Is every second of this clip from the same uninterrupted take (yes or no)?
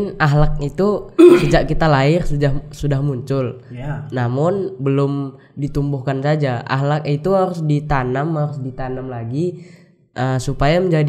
yes